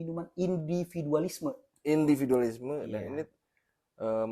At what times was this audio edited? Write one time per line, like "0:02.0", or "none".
0:01.6